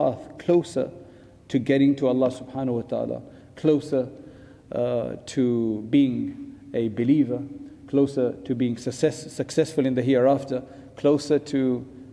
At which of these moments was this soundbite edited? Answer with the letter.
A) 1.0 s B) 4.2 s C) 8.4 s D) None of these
D